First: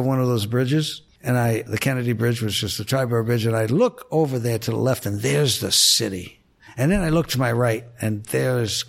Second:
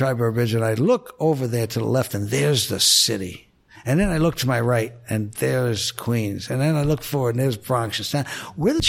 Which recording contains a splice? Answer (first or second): first